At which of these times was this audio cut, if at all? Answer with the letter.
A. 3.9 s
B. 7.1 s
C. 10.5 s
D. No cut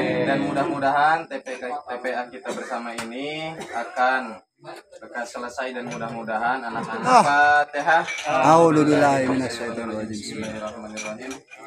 B